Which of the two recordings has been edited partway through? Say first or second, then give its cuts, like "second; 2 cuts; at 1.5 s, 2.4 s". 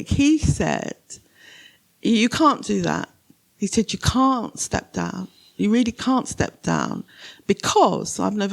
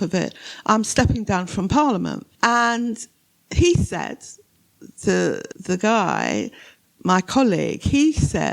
second; 2 cuts; at 2.3 s, 5.5 s